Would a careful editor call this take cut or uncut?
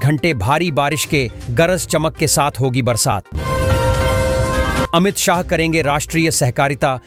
uncut